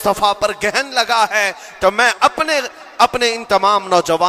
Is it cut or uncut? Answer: uncut